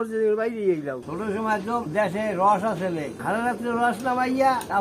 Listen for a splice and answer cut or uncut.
cut